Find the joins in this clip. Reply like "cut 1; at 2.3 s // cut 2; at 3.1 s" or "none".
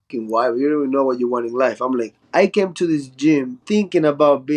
cut 1; at 2.2 s // cut 2; at 3.6 s